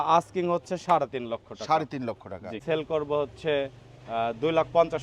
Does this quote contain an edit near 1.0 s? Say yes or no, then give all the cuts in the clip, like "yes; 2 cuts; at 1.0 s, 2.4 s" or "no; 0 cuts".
no; 1 cut; at 2.6 s